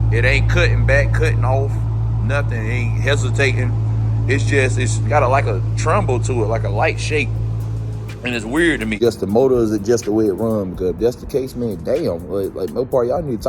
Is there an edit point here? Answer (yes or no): yes